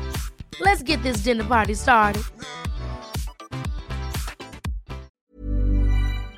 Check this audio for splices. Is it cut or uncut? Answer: cut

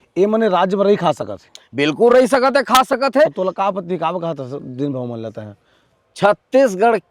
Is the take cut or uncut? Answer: uncut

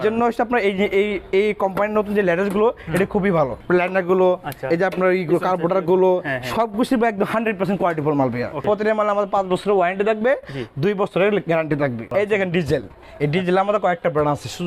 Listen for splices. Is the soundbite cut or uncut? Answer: cut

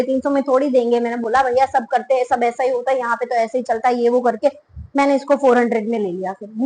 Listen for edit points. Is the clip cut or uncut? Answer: uncut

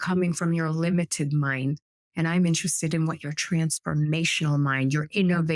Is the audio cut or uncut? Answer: uncut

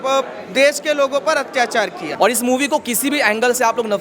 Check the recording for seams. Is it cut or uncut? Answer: cut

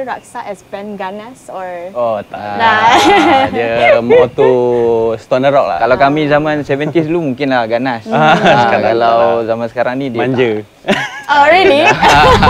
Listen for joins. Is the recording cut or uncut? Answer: uncut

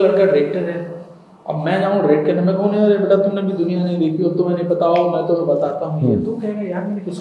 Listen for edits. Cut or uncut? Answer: uncut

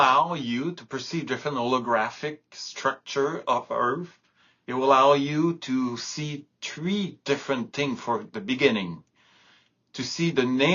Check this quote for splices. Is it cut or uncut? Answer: uncut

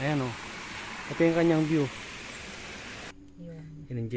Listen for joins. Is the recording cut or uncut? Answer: cut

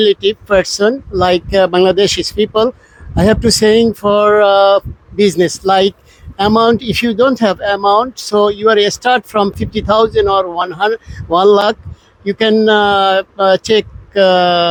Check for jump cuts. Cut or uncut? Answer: uncut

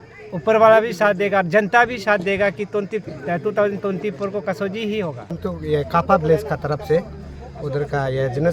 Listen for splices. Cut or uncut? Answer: uncut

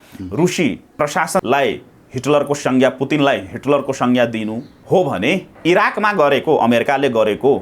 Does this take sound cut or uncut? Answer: cut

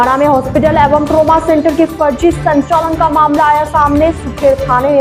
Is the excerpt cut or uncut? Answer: uncut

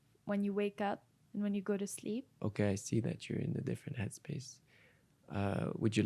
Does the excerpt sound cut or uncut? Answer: cut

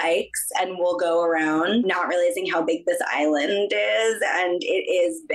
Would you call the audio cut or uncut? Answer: uncut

